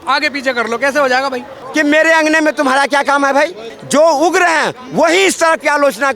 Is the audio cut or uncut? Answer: cut